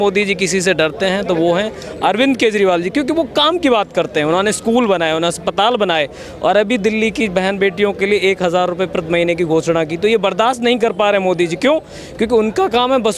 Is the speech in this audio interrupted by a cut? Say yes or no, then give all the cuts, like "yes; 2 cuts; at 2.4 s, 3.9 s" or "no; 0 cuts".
no; 0 cuts